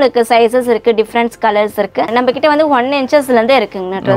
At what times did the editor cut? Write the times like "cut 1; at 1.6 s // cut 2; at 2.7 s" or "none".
cut 1; at 2.1 s